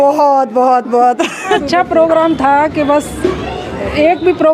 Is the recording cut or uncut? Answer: cut